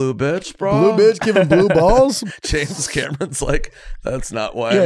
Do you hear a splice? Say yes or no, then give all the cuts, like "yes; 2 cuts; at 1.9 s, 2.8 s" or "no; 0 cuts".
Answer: yes; 1 cut; at 2.2 s